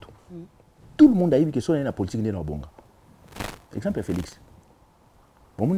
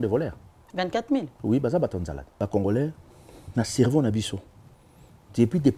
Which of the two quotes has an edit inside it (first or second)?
second